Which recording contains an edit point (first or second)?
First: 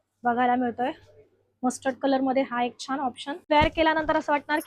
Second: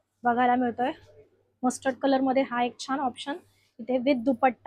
first